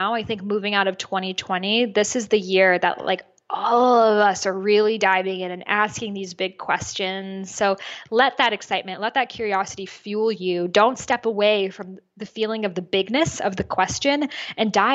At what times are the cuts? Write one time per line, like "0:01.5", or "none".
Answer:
none